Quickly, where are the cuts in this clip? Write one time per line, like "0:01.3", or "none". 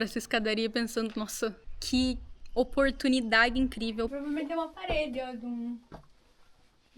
0:01.7
0:04.1